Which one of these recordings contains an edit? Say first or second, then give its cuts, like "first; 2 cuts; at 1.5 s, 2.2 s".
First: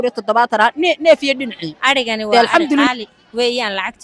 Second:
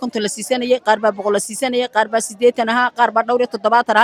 first; 1 cut; at 2.9 s